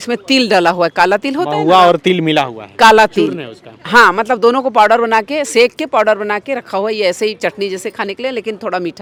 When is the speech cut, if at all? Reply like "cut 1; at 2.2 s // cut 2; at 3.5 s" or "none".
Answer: none